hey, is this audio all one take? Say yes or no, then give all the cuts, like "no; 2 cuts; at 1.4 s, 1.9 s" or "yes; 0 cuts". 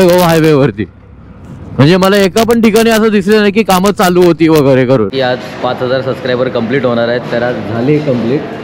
no; 1 cut; at 5.1 s